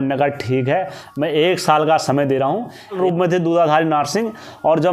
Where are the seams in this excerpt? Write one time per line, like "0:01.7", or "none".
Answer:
0:03.0